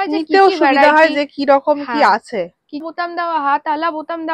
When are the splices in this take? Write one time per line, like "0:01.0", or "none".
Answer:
0:02.8

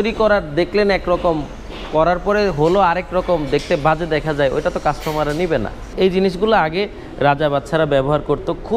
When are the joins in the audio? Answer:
0:05.9

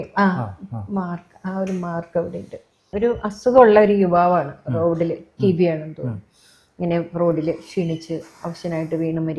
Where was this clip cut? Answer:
0:02.9

